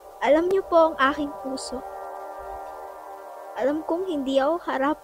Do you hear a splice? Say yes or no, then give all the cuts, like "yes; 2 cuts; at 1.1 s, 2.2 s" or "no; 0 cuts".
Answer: yes; 2 cuts; at 1.8 s, 3.4 s